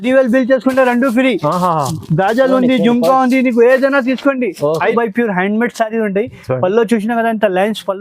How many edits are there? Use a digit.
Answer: 1